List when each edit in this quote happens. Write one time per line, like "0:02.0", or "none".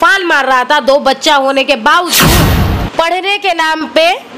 0:02.3

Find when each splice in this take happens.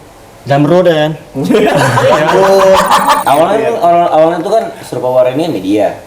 0:03.2

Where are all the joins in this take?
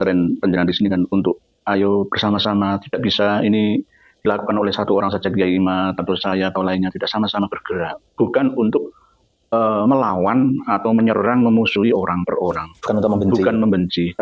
none

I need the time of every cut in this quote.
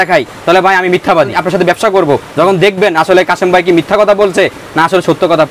0:01.4

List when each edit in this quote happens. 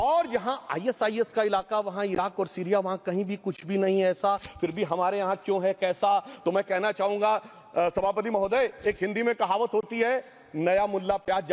none

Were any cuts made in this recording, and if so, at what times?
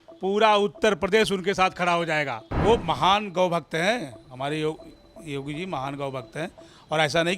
0:02.4

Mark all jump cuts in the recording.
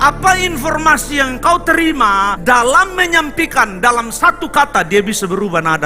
none

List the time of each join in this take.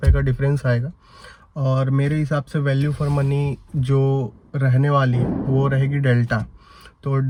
none

